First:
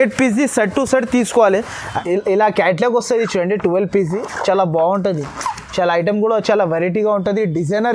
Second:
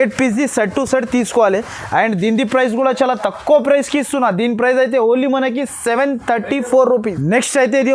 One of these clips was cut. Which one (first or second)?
first